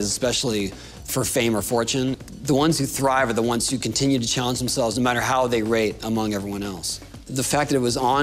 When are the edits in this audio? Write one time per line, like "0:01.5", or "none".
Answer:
0:02.2
0:07.3